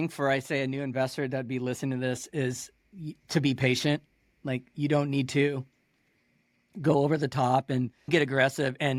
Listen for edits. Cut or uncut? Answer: uncut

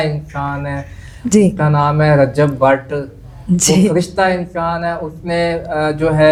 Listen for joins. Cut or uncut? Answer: uncut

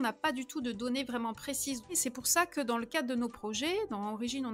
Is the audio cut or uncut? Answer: cut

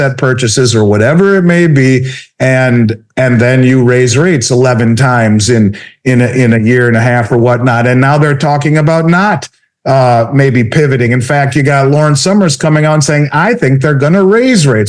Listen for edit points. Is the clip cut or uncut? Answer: uncut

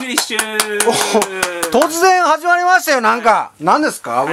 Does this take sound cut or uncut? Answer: uncut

